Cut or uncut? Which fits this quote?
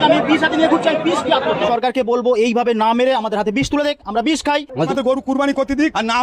cut